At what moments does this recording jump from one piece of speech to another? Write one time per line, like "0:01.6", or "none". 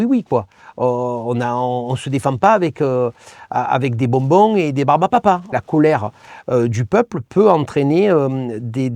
0:05.5